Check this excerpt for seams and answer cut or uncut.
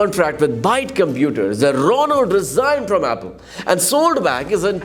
uncut